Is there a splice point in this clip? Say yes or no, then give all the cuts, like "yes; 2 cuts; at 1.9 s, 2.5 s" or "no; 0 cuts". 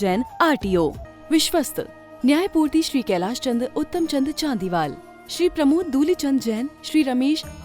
yes; 1 cut; at 1.1 s